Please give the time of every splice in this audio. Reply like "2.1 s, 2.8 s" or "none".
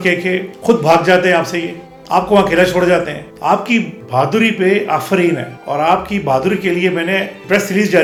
none

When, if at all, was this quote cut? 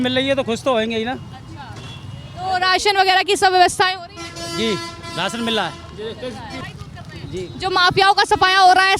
6.6 s

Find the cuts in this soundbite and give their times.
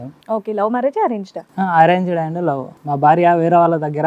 2.7 s

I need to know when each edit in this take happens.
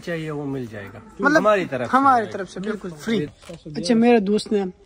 3.3 s

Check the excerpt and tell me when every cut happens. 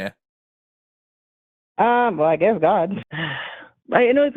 3.0 s

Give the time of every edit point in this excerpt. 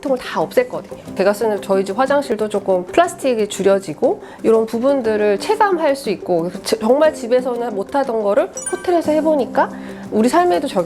1.1 s, 2.5 s

